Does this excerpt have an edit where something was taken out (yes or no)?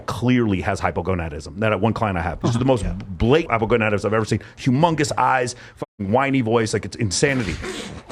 no